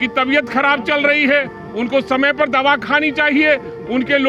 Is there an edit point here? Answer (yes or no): no